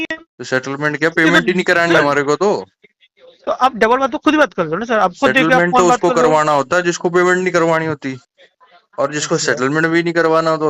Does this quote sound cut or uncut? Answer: uncut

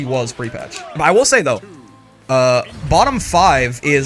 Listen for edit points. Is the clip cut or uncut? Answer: cut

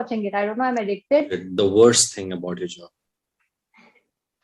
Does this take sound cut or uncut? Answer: cut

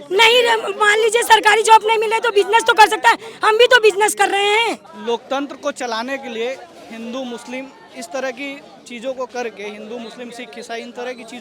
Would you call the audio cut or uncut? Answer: cut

